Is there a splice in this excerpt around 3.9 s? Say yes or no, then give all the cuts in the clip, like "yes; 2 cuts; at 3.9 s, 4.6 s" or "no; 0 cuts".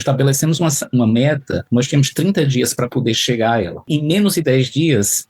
yes; 2 cuts; at 1.6 s, 3.9 s